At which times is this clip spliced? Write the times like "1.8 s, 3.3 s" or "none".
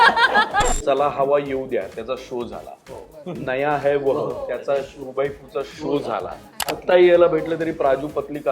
0.8 s, 6.8 s